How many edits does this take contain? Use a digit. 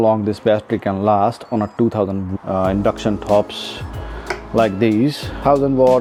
0